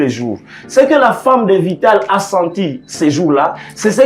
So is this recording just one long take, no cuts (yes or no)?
yes